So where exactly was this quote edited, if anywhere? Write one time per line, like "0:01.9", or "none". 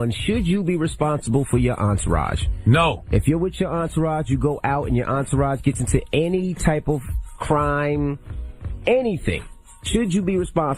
0:03.2